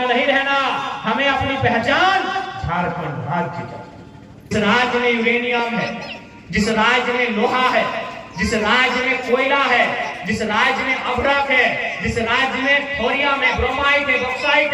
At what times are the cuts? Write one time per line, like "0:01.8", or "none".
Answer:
0:04.5